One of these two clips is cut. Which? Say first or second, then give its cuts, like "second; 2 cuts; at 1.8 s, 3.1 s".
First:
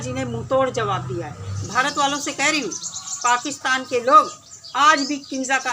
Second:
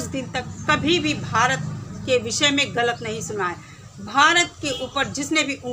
first; 1 cut; at 1.6 s